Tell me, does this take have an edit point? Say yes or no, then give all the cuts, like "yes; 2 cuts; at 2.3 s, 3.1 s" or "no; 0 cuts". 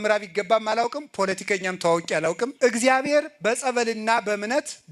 yes; 1 cut; at 2.5 s